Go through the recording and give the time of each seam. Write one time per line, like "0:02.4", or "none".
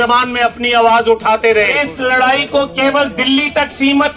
0:01.8

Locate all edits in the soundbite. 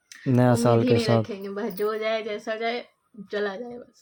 none

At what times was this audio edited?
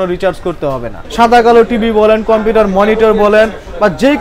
0:01.0

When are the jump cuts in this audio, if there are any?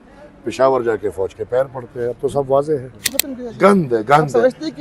0:03.0

